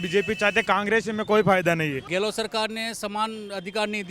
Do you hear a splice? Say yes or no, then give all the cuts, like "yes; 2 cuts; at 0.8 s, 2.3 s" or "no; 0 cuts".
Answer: yes; 1 cut; at 2.1 s